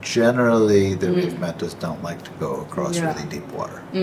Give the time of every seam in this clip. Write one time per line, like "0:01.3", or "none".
none